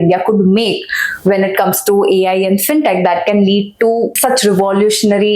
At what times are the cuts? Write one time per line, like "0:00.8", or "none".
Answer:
0:04.2